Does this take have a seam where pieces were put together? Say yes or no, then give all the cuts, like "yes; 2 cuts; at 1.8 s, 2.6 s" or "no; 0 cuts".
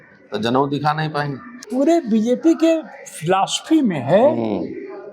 yes; 1 cut; at 1.6 s